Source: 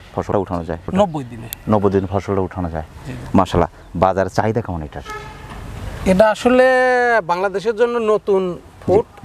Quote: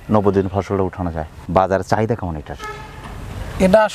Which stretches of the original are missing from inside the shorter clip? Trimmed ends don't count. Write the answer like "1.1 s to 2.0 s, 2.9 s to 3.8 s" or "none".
2.9 s to 3.8 s